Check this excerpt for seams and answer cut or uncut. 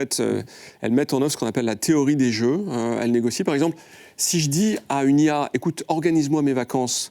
uncut